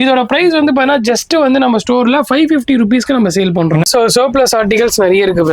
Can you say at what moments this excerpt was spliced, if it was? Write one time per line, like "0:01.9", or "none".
0:03.9